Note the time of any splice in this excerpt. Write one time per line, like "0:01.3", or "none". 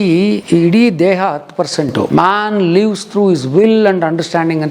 0:02.1